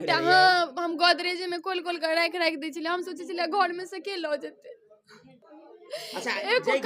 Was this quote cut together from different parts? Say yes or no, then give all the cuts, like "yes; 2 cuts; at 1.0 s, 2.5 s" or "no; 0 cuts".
no; 0 cuts